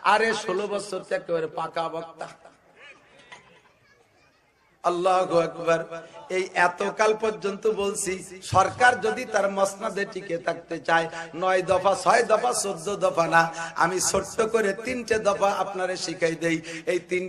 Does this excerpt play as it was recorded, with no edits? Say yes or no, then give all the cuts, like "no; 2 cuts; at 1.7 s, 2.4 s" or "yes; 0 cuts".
yes; 0 cuts